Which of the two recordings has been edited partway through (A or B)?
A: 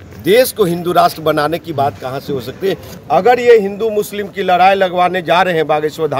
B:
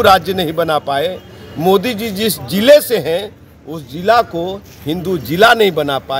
A